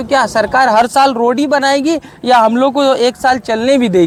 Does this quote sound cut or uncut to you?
uncut